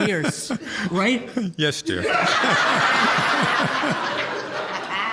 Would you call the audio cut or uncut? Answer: uncut